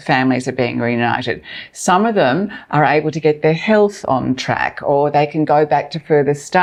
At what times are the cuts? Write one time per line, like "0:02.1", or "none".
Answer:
none